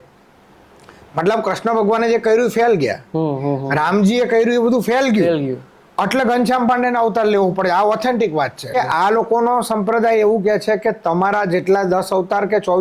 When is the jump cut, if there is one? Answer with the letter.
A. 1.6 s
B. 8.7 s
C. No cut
B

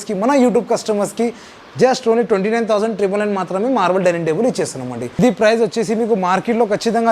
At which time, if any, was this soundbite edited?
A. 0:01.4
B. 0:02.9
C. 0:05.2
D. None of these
C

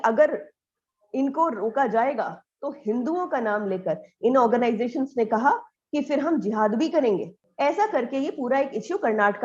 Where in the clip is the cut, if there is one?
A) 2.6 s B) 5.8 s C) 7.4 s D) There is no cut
C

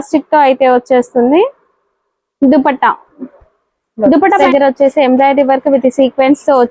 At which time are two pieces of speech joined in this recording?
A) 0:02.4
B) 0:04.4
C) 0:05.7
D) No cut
B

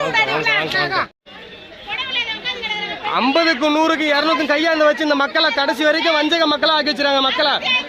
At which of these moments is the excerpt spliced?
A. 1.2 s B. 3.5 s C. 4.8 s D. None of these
A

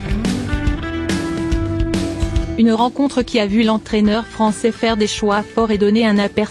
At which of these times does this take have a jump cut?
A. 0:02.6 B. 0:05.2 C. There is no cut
A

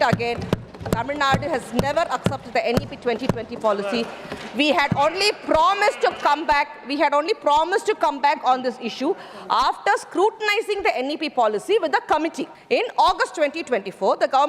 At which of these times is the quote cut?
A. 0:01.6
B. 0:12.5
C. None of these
B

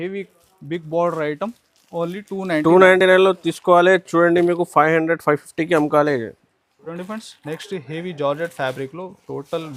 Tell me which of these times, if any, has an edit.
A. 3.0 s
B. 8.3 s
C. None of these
C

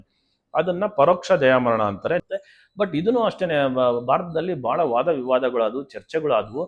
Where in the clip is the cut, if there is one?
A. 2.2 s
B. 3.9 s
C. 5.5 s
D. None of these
A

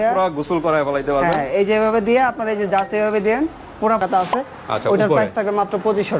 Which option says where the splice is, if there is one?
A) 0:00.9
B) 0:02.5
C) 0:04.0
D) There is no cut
C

